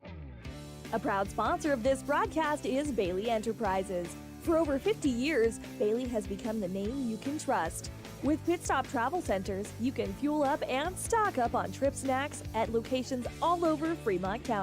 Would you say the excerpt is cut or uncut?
cut